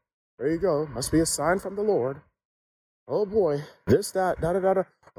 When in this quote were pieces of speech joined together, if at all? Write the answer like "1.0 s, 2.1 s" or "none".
none